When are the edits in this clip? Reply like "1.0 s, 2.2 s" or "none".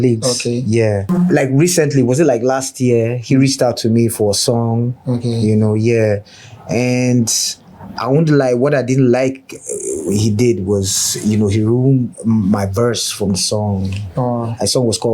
1.0 s

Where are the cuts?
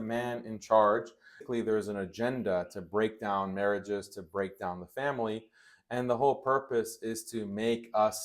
1.4 s

